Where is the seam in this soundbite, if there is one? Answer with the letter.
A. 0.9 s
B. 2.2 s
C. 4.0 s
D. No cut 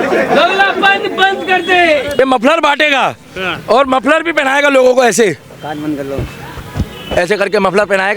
B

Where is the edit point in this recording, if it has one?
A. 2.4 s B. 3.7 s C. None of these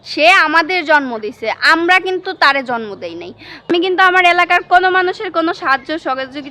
B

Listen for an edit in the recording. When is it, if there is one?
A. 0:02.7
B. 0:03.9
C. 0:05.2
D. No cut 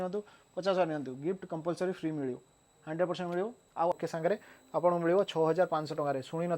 B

